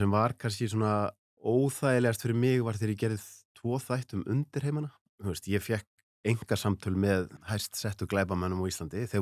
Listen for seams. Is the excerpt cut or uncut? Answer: cut